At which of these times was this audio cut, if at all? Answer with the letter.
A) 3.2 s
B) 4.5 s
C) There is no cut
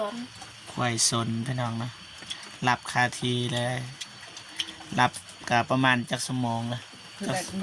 C